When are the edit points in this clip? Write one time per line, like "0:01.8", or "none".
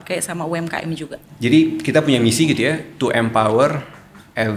0:01.1